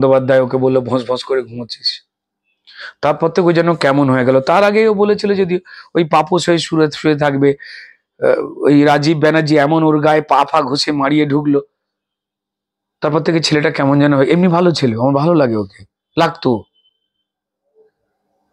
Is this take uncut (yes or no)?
yes